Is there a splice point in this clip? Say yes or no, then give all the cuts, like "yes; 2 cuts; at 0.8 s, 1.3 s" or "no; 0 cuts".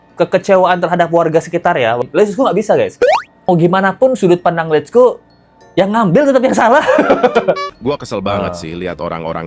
yes; 3 cuts; at 2.0 s, 3.3 s, 7.7 s